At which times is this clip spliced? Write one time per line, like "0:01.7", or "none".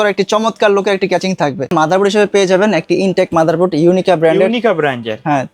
0:01.7